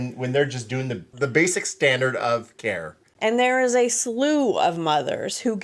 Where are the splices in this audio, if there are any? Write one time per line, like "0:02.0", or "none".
0:01.1
0:03.0